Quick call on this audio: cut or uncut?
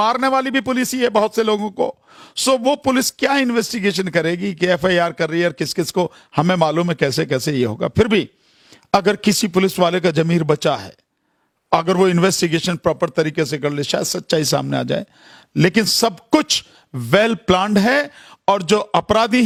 uncut